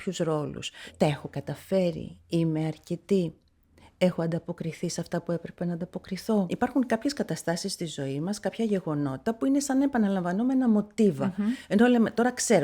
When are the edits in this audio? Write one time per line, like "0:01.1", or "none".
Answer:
0:00.9
0:06.5